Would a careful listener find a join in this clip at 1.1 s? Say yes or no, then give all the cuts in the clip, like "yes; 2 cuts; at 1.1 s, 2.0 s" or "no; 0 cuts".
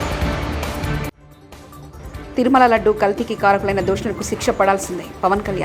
yes; 1 cut; at 1.1 s